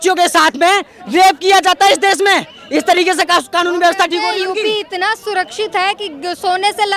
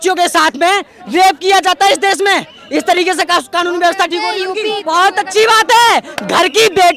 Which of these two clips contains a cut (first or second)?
second